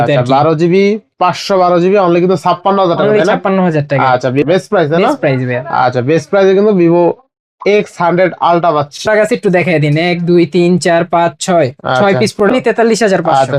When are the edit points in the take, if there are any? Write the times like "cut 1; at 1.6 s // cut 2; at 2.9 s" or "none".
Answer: cut 1; at 4.4 s // cut 2; at 9.1 s // cut 3; at 12.5 s

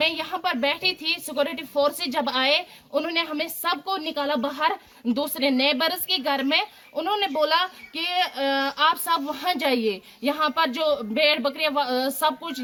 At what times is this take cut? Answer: none

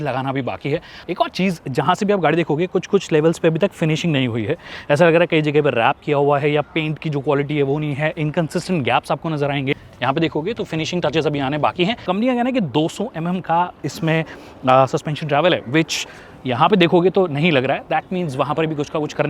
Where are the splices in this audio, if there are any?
cut 1; at 1.0 s // cut 2; at 9.7 s // cut 3; at 12.1 s

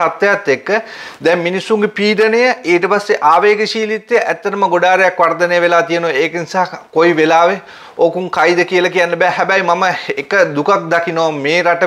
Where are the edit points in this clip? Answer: none

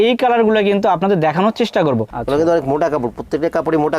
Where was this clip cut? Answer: cut 1; at 2.1 s

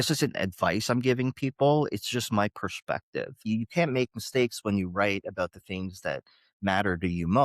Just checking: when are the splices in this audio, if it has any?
cut 1; at 3.4 s

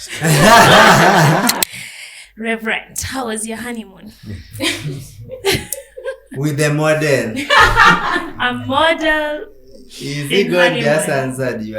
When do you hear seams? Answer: cut 1; at 1.6 s

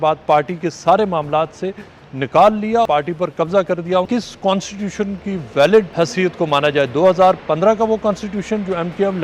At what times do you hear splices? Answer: cut 1; at 2.9 s // cut 2; at 4.1 s // cut 3; at 5.9 s

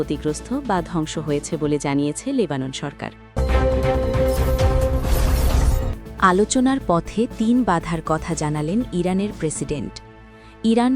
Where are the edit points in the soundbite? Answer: cut 1; at 3.3 s

